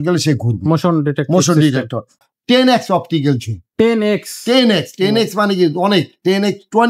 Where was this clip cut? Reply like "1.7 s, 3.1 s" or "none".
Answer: 2.1 s